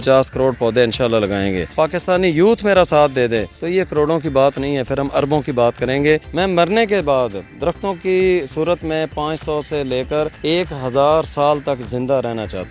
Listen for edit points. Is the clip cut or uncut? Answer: cut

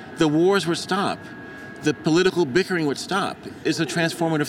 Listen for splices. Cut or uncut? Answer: cut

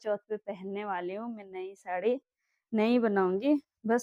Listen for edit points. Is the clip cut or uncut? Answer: uncut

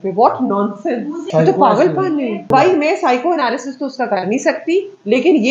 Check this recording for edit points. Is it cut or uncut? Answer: cut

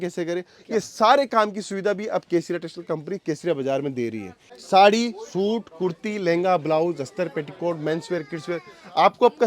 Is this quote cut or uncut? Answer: cut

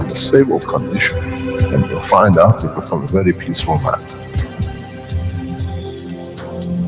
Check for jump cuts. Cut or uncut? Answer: uncut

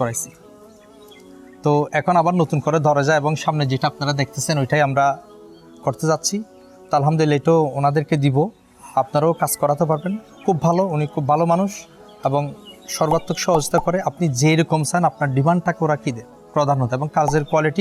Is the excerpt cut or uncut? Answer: uncut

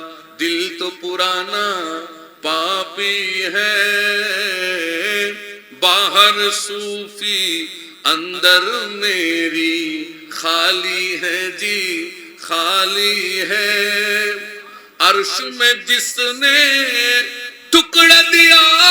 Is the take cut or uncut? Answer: uncut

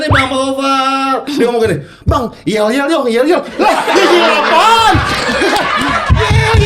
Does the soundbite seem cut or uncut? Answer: uncut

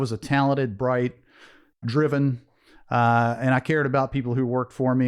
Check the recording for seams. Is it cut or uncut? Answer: cut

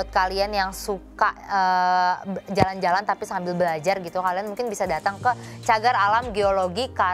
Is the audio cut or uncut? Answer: uncut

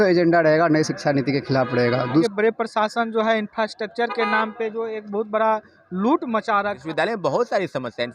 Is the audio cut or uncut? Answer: cut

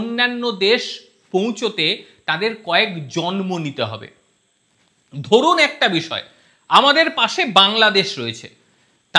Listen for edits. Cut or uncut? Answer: uncut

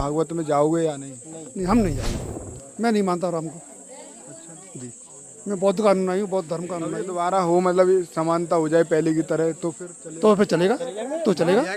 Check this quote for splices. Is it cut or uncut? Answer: uncut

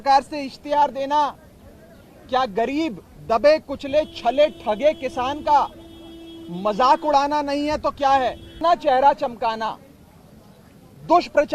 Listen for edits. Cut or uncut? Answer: cut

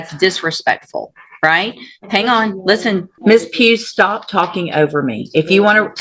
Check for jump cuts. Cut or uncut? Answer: cut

